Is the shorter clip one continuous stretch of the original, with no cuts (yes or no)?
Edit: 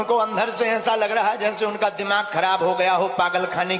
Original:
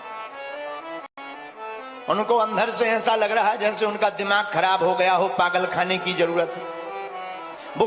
yes